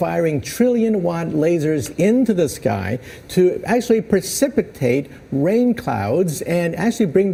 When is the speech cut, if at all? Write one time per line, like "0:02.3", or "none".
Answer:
none